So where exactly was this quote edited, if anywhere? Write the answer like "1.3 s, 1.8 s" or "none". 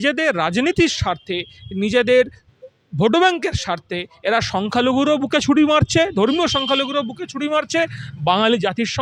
none